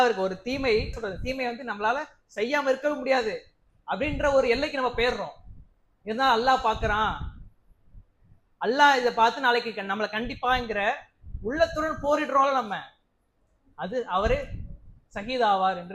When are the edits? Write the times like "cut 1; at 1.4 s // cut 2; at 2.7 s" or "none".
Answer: cut 1; at 1.0 s